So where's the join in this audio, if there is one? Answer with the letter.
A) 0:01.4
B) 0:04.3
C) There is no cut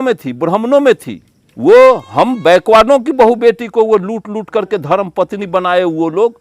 A